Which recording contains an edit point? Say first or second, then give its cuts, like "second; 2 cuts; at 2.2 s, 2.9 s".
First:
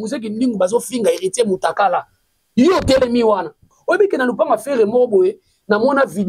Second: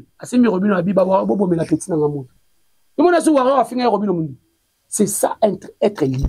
first; 1 cut; at 3.7 s